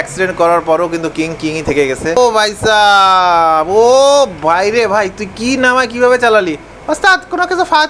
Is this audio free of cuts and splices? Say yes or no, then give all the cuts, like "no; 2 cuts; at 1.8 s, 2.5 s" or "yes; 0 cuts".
no; 1 cut; at 2.2 s